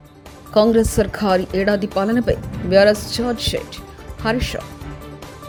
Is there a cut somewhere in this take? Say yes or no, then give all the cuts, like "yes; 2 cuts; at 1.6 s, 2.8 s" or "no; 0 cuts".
no; 0 cuts